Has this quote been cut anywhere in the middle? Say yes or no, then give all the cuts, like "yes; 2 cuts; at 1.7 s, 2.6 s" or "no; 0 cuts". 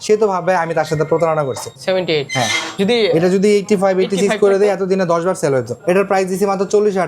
yes; 2 cuts; at 1.7 s, 5.8 s